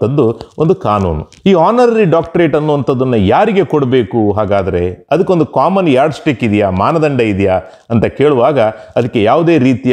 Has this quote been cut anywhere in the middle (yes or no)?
yes